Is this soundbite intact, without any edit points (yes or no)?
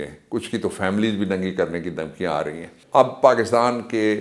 no